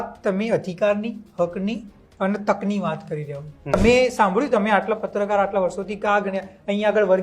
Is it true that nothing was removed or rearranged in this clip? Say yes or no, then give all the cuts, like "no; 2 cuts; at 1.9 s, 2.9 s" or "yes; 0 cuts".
no; 1 cut; at 3.7 s